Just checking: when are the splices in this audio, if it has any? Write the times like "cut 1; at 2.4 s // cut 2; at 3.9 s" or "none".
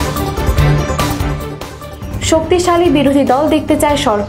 cut 1; at 1.5 s